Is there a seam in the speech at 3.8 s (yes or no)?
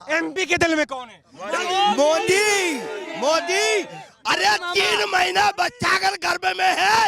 no